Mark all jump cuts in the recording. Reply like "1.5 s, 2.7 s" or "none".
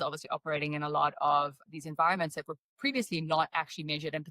1.6 s, 2.8 s